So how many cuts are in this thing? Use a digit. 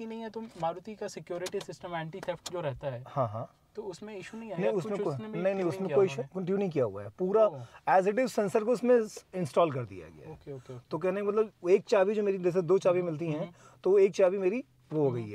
0